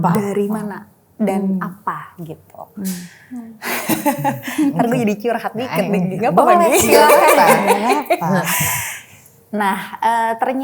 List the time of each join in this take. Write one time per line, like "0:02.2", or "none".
none